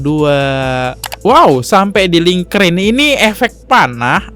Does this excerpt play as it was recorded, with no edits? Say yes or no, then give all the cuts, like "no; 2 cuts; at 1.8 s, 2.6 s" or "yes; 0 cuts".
no; 1 cut; at 1.0 s